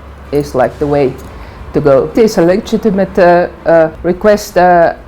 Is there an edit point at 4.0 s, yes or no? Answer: yes